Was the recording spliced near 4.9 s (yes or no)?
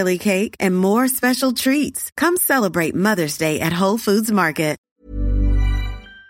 yes